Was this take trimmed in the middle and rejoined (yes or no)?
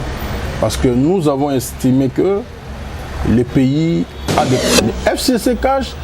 yes